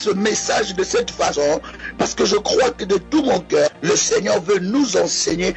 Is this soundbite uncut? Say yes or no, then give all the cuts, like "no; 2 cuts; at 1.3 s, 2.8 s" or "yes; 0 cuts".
no; 1 cut; at 1.8 s